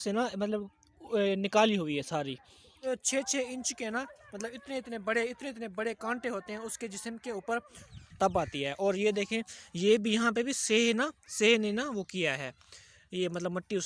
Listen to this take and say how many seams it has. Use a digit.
2